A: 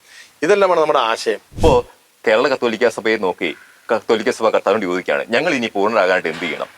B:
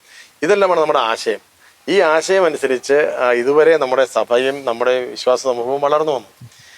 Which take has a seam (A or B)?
A